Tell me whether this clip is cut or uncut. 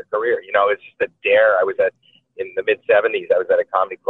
uncut